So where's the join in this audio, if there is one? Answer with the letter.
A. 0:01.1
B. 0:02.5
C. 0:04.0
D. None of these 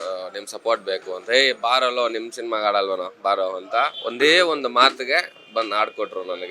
C